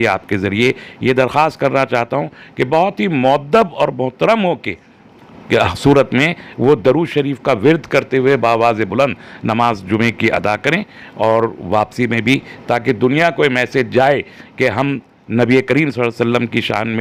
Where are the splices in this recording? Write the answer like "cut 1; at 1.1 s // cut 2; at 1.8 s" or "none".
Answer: none